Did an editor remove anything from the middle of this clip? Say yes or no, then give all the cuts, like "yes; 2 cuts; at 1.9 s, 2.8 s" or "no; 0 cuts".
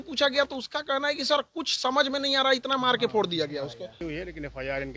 yes; 1 cut; at 4.0 s